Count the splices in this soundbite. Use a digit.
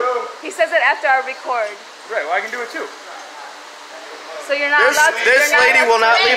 1